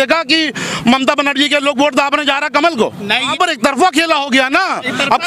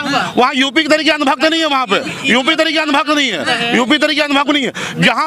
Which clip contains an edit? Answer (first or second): first